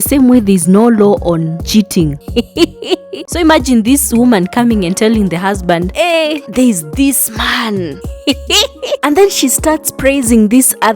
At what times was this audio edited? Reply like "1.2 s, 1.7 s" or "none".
3.2 s